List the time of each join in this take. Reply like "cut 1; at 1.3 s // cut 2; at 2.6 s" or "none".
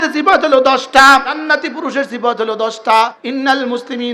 cut 1; at 1.4 s // cut 2; at 3.2 s